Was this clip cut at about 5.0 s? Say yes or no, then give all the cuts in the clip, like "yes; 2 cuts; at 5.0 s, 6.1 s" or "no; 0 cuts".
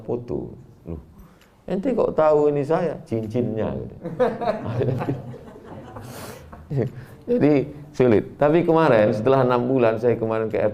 no; 0 cuts